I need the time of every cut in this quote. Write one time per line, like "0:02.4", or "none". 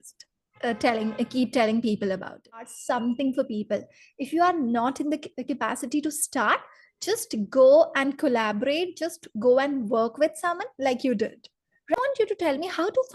0:02.7
0:12.0